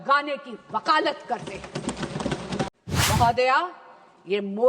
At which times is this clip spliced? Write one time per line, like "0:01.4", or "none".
0:02.7

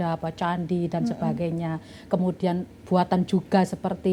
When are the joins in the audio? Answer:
none

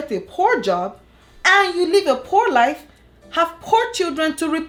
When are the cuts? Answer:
none

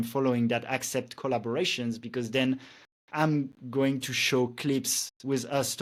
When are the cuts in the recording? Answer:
none

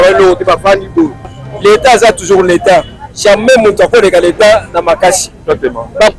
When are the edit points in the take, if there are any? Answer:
0:01.3

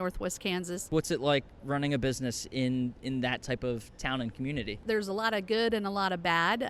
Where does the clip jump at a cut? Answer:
0:00.9
0:04.8

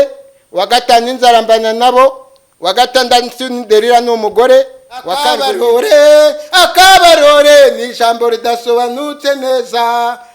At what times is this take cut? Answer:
0:05.3

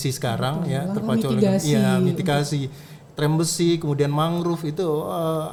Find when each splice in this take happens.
none

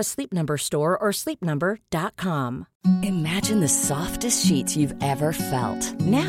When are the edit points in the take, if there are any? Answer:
0:02.7

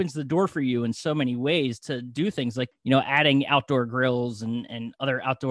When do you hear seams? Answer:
0:02.7

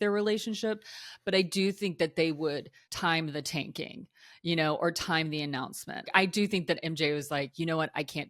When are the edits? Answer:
0:03.0
0:06.1
0:07.5

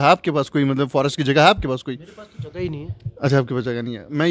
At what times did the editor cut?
none

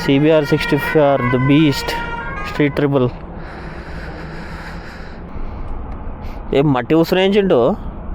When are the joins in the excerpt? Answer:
0:05.3

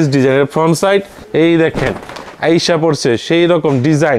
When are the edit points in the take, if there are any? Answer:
0:01.2

